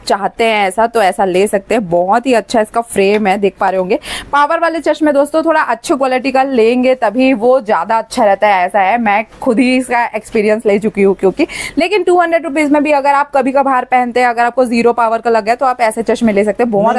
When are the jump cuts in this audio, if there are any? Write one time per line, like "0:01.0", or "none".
none